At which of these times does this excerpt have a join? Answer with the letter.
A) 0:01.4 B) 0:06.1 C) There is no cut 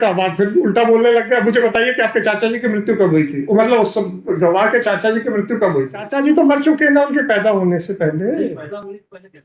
B